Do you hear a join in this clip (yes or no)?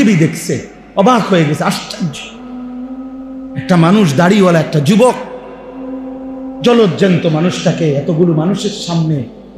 yes